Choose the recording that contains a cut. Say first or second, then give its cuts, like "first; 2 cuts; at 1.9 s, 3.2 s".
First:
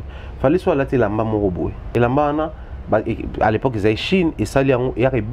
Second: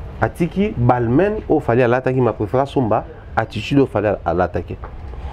first; 1 cut; at 1.8 s